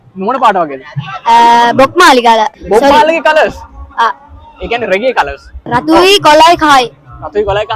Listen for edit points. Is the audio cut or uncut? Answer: cut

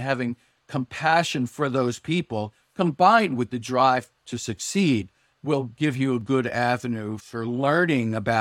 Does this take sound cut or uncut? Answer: cut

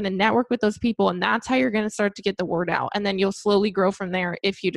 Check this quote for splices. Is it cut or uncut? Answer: uncut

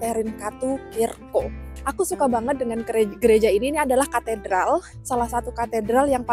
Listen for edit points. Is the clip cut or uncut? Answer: cut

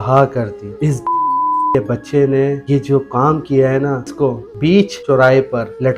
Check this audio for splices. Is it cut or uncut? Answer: cut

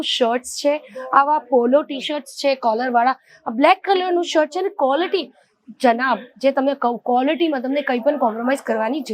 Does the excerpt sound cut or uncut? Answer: uncut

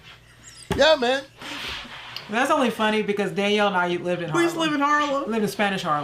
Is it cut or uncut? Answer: uncut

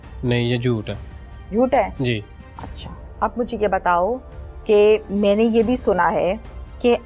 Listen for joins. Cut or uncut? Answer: uncut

